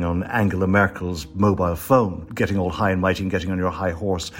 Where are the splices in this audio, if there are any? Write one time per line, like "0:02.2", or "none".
0:02.3